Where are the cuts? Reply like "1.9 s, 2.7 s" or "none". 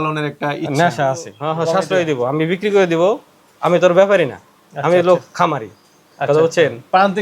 1.3 s